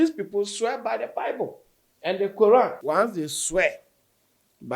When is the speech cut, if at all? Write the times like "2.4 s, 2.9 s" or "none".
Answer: 2.8 s